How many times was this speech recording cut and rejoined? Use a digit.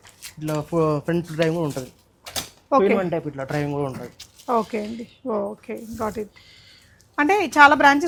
0